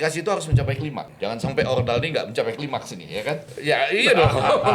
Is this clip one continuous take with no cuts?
no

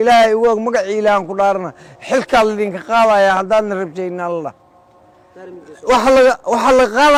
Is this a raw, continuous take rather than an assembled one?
yes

